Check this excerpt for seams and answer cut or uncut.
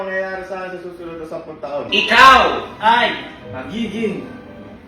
cut